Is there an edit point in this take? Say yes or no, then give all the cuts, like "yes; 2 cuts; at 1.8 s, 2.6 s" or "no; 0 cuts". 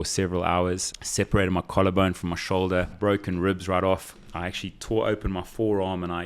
yes; 2 cuts; at 0.9 s, 2.9 s